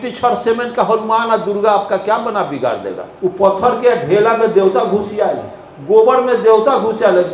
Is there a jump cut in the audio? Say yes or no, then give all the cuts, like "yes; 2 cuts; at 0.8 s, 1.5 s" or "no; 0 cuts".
yes; 1 cut; at 3.1 s